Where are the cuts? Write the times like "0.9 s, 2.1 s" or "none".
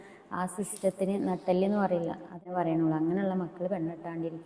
2.5 s